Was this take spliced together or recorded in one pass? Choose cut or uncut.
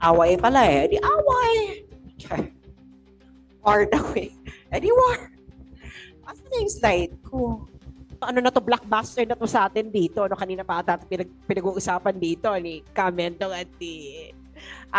cut